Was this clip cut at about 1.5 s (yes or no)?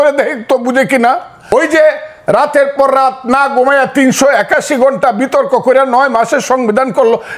yes